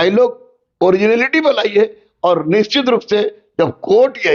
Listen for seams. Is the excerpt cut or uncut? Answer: uncut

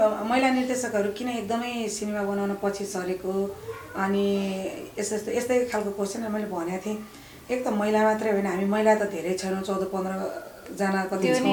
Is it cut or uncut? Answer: uncut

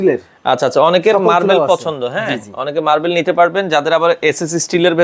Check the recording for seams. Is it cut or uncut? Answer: uncut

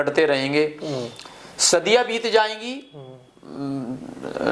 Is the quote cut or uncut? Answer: uncut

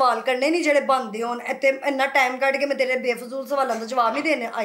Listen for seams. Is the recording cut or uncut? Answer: uncut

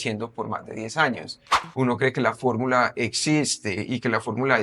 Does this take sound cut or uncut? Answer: cut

